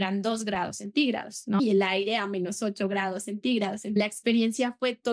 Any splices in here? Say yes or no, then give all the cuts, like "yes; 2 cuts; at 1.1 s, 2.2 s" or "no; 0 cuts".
yes; 1 cut; at 1.6 s